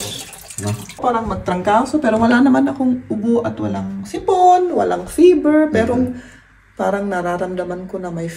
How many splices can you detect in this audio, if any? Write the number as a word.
one